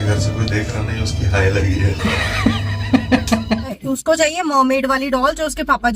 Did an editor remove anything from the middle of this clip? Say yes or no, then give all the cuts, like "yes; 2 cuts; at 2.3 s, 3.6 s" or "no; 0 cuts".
yes; 1 cut; at 3.8 s